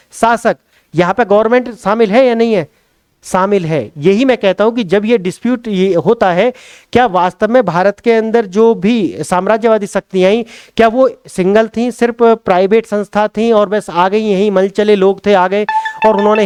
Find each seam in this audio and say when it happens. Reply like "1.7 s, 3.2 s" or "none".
none